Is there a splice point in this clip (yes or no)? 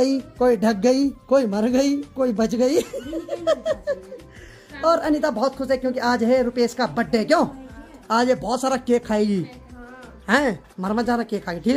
no